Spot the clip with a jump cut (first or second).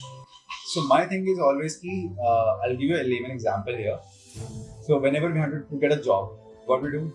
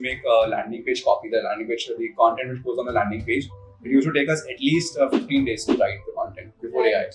first